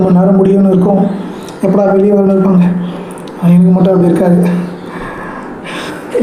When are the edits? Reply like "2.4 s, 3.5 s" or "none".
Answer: none